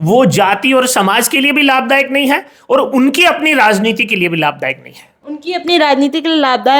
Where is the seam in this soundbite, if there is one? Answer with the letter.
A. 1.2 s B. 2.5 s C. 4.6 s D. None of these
D